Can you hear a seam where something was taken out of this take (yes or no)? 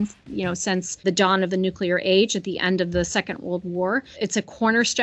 yes